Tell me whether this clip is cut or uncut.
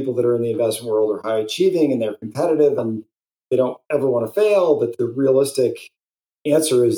cut